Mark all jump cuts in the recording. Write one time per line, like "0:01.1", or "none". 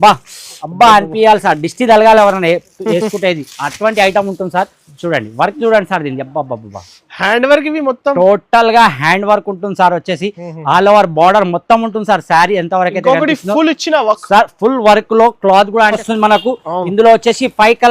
0:16.1